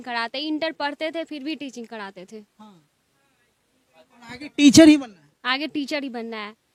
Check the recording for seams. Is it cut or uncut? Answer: uncut